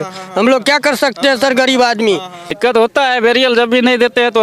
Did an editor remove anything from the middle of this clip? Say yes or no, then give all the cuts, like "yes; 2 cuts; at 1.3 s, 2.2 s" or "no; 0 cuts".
yes; 1 cut; at 2.5 s